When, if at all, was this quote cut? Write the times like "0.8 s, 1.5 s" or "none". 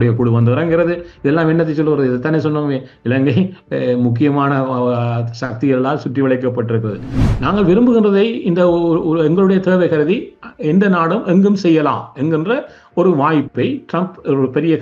7.1 s